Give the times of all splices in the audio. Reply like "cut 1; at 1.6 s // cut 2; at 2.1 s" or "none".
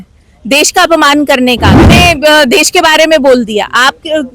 cut 1; at 1.8 s